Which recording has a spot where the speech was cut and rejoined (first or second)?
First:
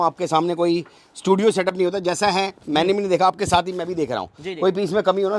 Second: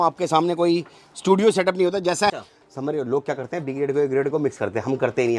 second